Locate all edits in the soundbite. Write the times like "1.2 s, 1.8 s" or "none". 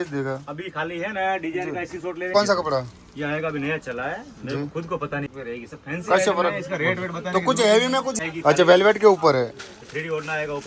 2.3 s, 5.3 s, 8.2 s